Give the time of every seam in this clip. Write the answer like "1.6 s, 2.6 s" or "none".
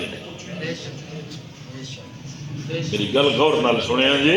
none